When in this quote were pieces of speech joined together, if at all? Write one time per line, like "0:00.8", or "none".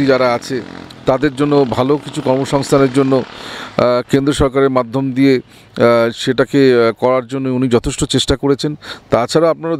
none